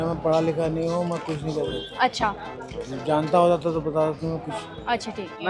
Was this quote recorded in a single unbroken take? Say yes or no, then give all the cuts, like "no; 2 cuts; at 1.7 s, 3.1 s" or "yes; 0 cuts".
yes; 0 cuts